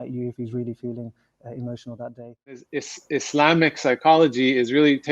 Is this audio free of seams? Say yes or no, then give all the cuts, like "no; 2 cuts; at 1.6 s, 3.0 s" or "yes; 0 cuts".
no; 1 cut; at 2.7 s